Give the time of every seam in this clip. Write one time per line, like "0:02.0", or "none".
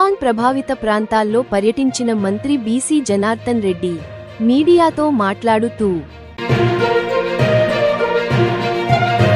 none